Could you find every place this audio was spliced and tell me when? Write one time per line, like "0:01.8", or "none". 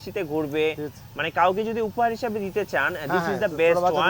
none